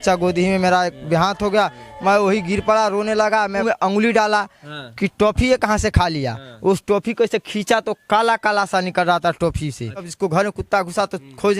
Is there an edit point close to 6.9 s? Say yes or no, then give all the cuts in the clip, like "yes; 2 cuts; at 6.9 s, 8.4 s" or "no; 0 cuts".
no; 2 cuts; at 3.6 s, 10.1 s